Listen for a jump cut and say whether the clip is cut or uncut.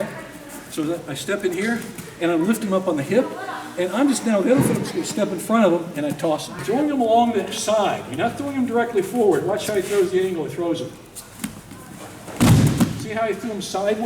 cut